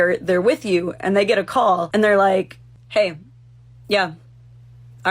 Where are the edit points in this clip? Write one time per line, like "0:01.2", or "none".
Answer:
0:01.9

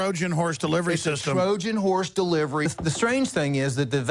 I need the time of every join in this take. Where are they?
0:02.6

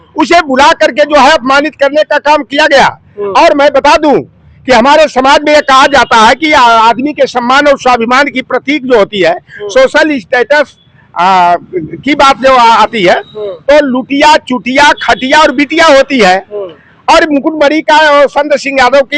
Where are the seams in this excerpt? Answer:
none

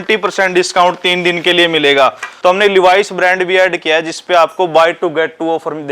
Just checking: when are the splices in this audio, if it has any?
0:02.3

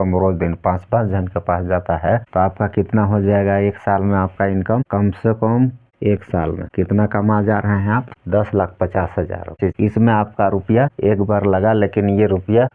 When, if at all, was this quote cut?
0:05.8
0:09.6

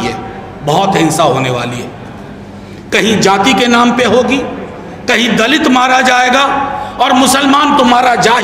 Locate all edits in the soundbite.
none

